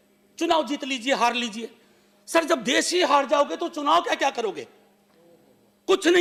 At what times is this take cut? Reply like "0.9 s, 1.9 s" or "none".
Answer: none

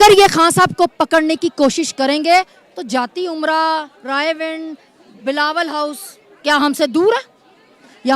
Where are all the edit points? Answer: none

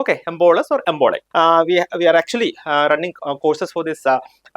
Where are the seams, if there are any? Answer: 1.2 s

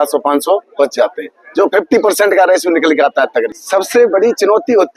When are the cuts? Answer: 3.6 s

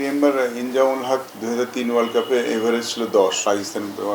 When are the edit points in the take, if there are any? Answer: 1.3 s, 3.4 s

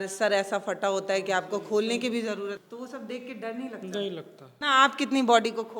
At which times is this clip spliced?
2.6 s, 4.4 s

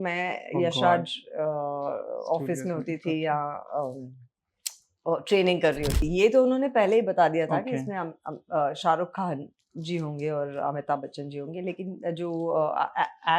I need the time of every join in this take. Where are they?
6.0 s

